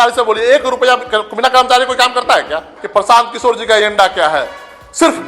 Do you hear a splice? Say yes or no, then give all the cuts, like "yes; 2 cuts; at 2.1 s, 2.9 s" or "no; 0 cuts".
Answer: yes; 1 cut; at 2.7 s